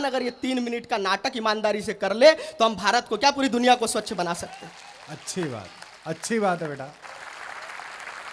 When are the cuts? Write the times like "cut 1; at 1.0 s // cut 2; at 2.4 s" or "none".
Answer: cut 1; at 6.9 s